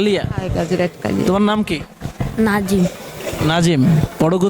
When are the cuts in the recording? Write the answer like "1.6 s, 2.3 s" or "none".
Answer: 1.3 s